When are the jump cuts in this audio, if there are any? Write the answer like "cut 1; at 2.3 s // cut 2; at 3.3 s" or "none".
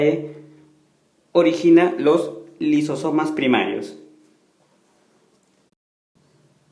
cut 1; at 2.7 s